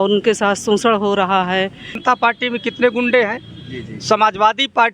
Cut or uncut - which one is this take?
cut